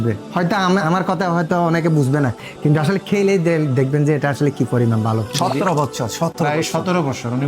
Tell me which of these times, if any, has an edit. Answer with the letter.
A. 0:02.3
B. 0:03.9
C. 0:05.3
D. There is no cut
C